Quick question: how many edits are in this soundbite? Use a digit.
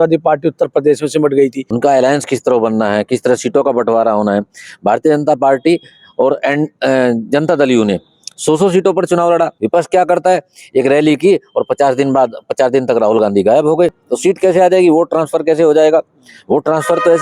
3